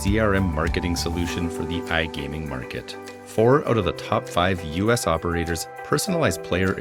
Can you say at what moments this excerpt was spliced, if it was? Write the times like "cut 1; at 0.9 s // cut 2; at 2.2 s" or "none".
none